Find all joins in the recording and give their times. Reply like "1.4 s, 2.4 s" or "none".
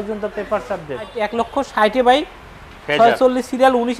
1.2 s